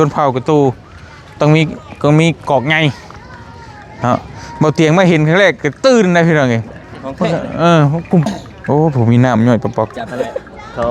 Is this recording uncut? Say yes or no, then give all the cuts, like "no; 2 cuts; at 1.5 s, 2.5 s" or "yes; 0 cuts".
no; 1 cut; at 8.3 s